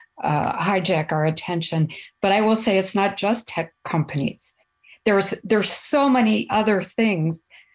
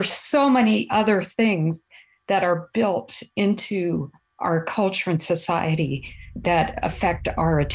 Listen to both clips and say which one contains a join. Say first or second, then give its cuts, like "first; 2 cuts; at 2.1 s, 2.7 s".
second; 1 cut; at 6.3 s